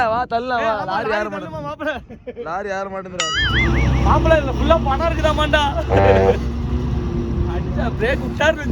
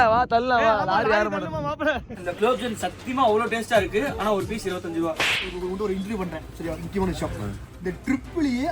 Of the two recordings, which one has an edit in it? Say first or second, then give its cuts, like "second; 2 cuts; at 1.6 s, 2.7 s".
second; 2 cuts; at 2.2 s, 5.4 s